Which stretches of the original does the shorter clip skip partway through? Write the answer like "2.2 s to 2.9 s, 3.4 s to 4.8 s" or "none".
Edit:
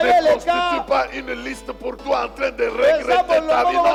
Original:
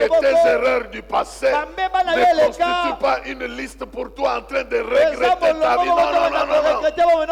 none